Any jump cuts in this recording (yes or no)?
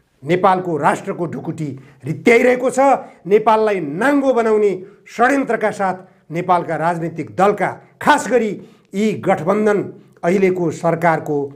no